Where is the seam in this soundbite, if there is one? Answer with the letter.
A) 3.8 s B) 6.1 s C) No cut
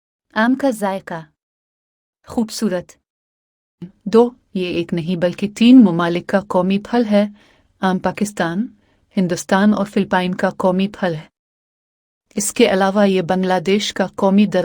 A